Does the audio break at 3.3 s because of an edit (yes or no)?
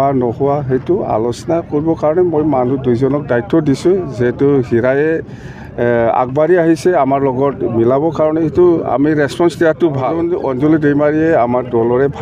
no